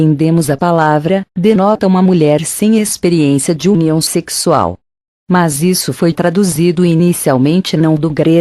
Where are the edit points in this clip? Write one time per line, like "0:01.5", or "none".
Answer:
none